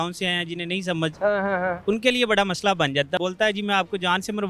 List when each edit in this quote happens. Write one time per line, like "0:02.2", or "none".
0:03.2